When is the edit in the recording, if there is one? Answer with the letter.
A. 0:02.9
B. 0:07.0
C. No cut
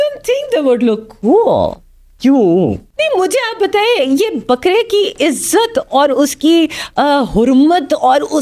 A